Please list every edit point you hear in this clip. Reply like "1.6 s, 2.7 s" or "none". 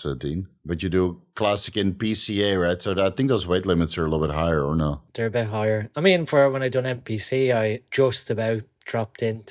4.9 s, 7.8 s